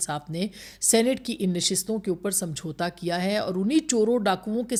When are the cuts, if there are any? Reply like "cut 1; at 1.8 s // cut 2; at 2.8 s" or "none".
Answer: none